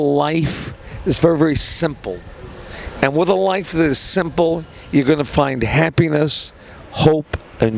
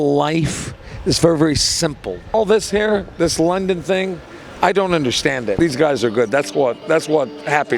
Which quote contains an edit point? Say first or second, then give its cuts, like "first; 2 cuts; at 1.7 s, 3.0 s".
second; 2 cuts; at 2.2 s, 5.6 s